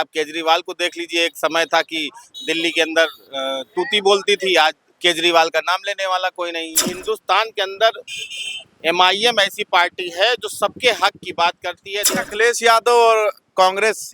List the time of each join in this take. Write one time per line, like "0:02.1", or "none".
0:06.9
0:12.1